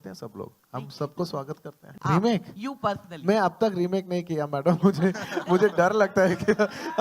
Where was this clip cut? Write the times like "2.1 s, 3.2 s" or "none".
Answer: 1.8 s